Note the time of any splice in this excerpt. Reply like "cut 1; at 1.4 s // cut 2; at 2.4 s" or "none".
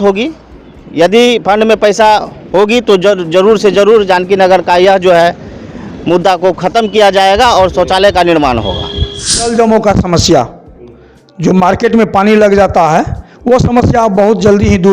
cut 1; at 9.4 s